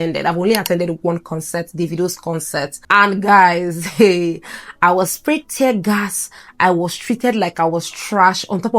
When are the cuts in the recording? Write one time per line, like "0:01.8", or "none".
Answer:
0:02.8